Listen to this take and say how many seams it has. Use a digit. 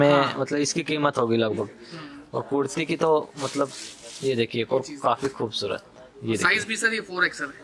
0